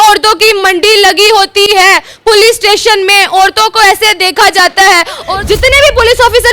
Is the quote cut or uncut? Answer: cut